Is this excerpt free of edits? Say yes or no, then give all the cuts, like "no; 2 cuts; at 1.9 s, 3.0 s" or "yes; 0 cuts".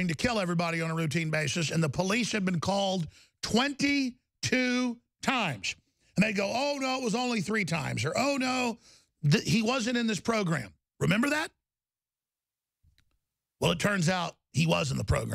yes; 0 cuts